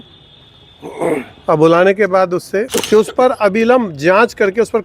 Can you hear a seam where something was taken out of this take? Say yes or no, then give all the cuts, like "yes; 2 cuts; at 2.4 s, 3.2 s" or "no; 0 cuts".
yes; 1 cut; at 2.7 s